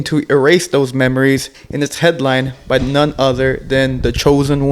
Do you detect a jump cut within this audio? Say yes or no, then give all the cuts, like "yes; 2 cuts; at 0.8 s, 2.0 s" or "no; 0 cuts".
yes; 1 cut; at 1.6 s